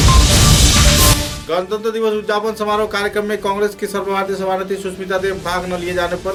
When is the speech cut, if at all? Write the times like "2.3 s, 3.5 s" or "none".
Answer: none